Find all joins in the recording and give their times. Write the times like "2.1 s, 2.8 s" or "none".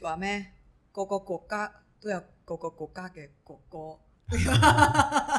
none

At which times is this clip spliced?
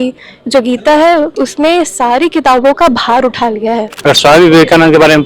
3.9 s

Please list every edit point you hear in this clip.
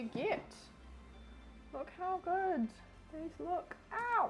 none

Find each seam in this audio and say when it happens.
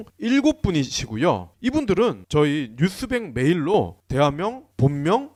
none

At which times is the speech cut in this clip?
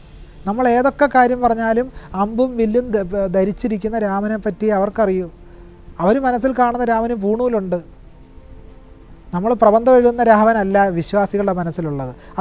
none

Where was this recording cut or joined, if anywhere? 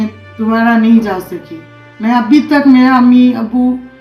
none

